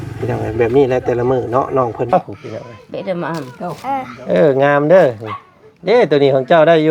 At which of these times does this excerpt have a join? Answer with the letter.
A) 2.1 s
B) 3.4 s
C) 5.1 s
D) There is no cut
A